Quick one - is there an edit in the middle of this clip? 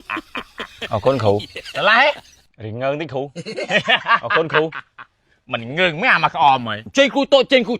yes; 1 cut; at 6.8 s

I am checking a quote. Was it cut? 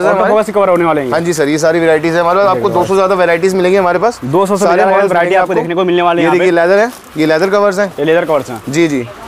no; 0 cuts

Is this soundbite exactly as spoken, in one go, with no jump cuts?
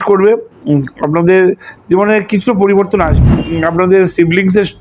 no; 1 cut; at 3.2 s

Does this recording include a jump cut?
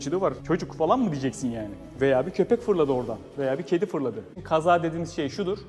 yes; 1 cut; at 4.4 s

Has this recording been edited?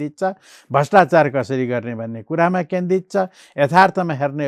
no; 0 cuts

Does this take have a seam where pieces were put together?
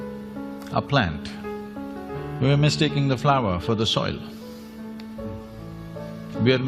yes; 1 cut; at 4.0 s

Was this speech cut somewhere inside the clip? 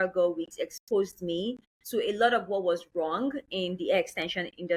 no; 0 cuts

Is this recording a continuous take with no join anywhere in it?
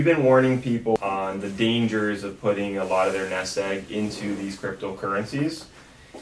no; 1 cut; at 1.0 s

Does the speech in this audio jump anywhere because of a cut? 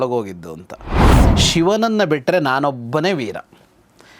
yes; 1 cut; at 1.2 s

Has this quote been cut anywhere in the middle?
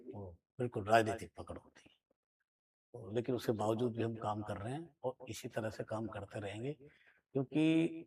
no; 0 cuts

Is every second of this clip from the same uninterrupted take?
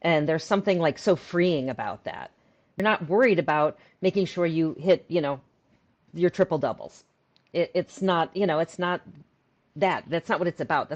no; 1 cut; at 2.8 s

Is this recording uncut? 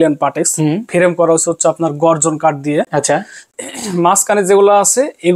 yes; 0 cuts

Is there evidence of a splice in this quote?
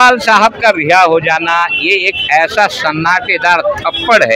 no; 0 cuts

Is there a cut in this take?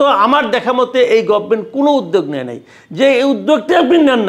no; 0 cuts

